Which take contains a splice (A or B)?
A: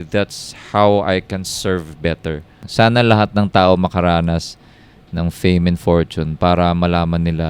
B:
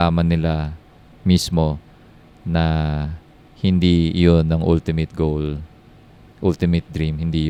A